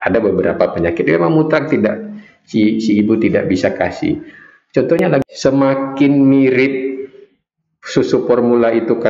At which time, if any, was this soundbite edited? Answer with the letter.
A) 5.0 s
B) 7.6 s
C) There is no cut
A